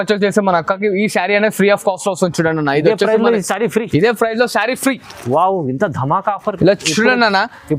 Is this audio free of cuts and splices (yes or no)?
yes